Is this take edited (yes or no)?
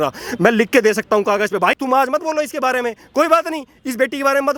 no